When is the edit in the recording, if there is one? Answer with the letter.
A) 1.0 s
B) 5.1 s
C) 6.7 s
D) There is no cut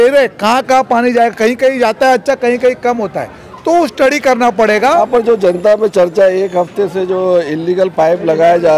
B